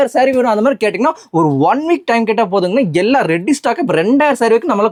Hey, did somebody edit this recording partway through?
no; 0 cuts

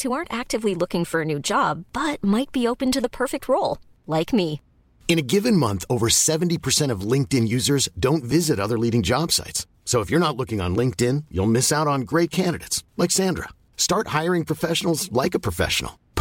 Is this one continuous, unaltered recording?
yes; 0 cuts

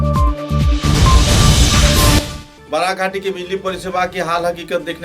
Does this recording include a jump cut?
yes; 1 cut; at 2.3 s

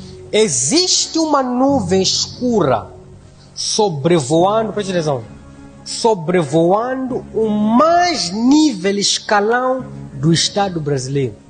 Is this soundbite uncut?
yes; 0 cuts

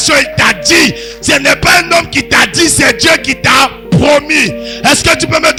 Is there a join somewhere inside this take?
no; 0 cuts

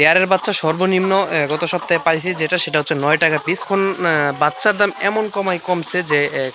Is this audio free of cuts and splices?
no; 1 cut; at 3.6 s

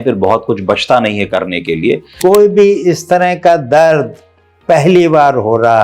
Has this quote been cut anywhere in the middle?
yes; 1 cut; at 2.1 s

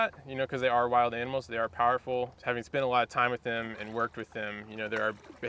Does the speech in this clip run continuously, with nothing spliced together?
yes; 0 cuts

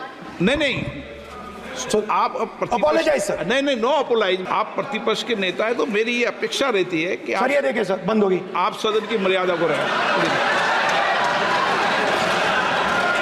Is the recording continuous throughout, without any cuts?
no; 1 cut; at 4.4 s

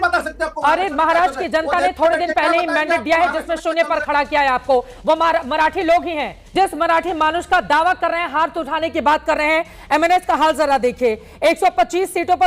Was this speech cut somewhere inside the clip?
yes; 1 cut; at 6.4 s

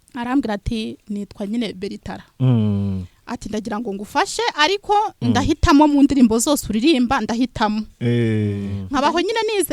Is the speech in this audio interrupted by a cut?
yes; 1 cut; at 8.7 s

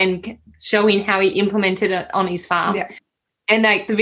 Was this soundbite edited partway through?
yes; 1 cut; at 3.0 s

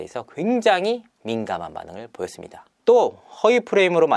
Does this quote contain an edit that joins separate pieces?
no; 0 cuts

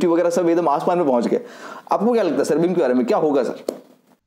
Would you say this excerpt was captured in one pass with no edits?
yes; 0 cuts

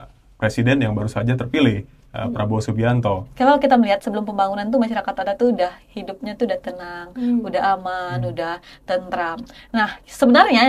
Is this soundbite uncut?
no; 1 cut; at 3.3 s

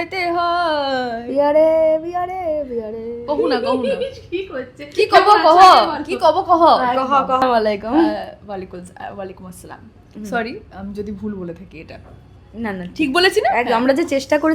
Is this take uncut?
no; 1 cut; at 7.4 s

